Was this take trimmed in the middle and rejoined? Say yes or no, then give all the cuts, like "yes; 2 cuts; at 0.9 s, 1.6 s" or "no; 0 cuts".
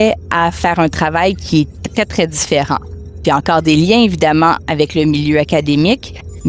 yes; 1 cut; at 3.2 s